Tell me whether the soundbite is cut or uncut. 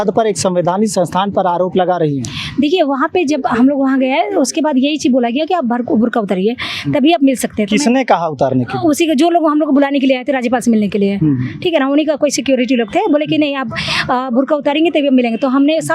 uncut